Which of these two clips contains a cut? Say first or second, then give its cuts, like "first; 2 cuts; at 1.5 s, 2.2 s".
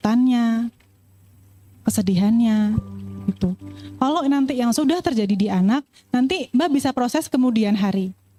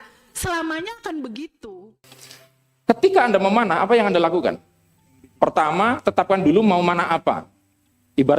second; 1 cut; at 1.7 s